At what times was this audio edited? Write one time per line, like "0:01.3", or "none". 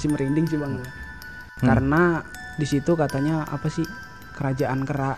0:01.4